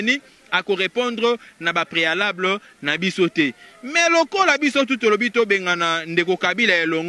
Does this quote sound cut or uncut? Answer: uncut